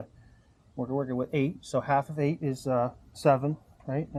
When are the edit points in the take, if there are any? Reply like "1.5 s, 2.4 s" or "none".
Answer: none